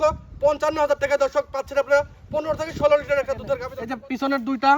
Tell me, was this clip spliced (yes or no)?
yes